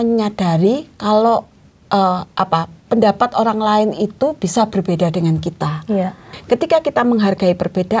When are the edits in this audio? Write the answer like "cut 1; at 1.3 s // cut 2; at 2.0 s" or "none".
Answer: cut 1; at 6.3 s